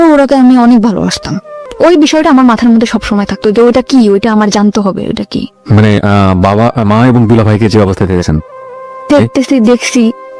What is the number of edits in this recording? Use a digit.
1